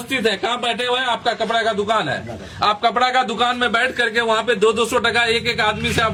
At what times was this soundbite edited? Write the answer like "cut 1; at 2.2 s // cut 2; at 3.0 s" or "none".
none